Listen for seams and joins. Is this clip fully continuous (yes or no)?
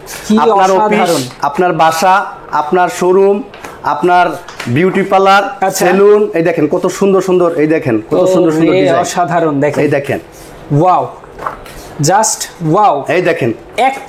yes